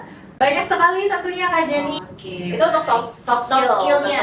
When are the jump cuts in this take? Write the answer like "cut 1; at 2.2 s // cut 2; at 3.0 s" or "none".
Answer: cut 1; at 2.0 s